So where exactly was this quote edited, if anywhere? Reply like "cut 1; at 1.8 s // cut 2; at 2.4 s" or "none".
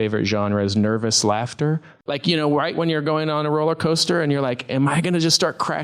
cut 1; at 1.9 s